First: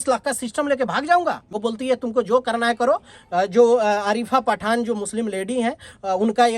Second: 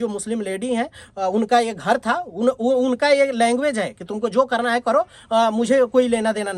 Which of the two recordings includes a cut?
first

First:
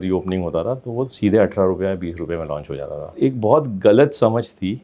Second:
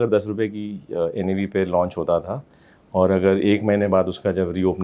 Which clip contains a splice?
first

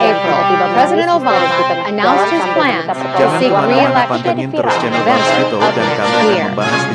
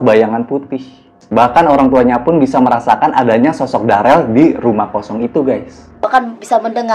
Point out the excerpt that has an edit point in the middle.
second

